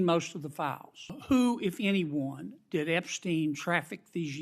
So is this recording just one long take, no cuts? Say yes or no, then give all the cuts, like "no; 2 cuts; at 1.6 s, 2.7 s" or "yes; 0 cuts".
no; 1 cut; at 1.2 s